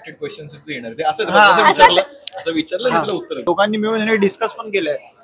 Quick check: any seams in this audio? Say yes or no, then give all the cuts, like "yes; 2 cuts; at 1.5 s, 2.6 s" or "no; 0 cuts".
yes; 1 cut; at 3.3 s